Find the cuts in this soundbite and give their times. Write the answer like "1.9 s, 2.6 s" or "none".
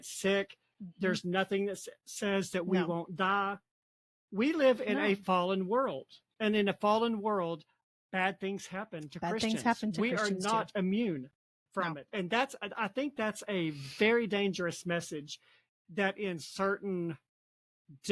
none